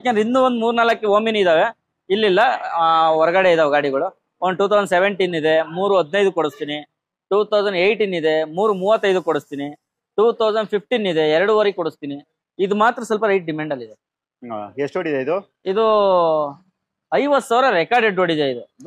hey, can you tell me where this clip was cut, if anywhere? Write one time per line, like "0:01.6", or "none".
none